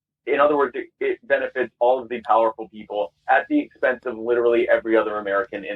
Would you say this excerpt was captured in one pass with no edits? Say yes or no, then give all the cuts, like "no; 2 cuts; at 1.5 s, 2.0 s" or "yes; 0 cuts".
yes; 0 cuts